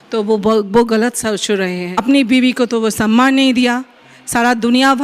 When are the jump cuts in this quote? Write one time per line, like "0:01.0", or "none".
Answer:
0:02.0